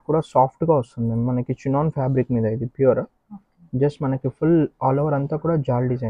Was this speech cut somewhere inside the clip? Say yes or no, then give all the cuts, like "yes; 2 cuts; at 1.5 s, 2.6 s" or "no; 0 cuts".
no; 0 cuts